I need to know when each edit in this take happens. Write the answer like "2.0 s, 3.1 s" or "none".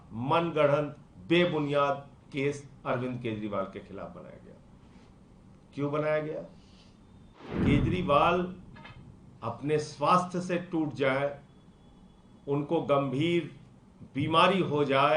7.5 s